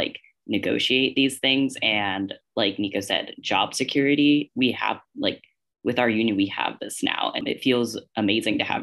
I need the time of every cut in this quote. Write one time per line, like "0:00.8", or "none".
0:07.4